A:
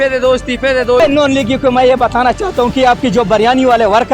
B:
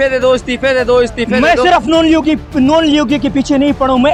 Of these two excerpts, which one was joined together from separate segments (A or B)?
A